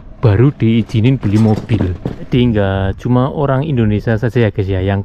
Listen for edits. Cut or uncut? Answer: cut